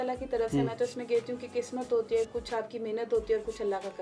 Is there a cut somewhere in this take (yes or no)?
no